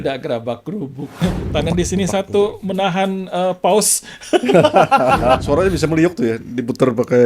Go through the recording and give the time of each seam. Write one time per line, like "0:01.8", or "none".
0:01.2
0:05.4